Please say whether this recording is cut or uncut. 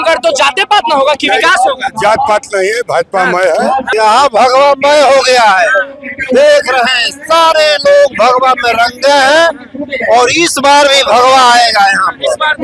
cut